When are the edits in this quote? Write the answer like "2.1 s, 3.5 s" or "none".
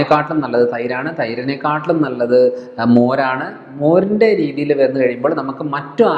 none